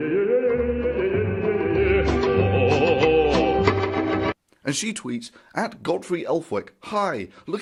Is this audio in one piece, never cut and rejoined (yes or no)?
yes